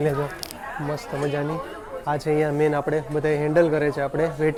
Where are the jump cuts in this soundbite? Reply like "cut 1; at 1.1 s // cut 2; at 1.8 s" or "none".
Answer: none